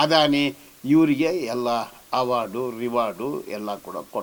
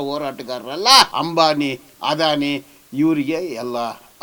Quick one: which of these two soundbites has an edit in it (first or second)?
second